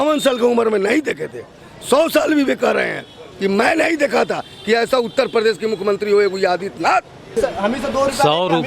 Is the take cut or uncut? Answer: cut